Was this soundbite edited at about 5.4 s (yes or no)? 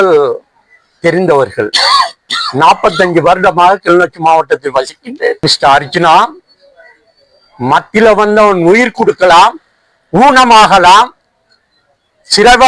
yes